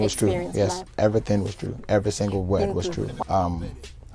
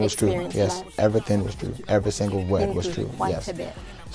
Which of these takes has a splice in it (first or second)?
first